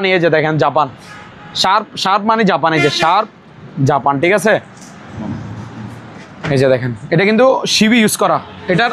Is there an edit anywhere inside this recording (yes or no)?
no